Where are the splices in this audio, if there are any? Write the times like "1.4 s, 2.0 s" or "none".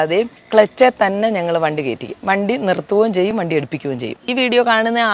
4.2 s